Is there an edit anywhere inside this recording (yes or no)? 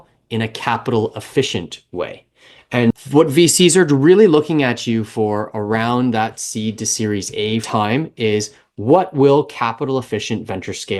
yes